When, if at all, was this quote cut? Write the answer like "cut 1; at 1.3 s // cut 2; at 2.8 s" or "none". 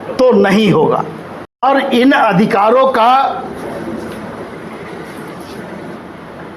cut 1; at 1.4 s